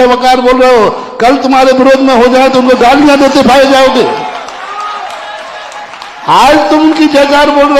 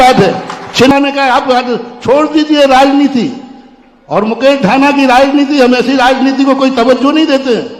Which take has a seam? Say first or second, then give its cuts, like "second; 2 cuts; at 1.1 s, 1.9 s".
second; 1 cut; at 0.9 s